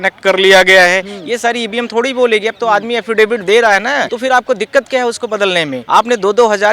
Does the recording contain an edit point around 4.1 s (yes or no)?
yes